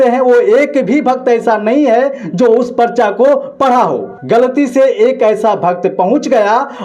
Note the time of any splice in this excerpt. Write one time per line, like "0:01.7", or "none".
none